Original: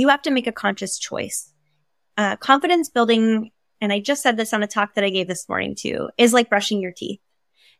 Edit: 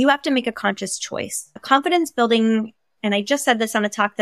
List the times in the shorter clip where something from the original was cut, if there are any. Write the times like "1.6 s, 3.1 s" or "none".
1.6 s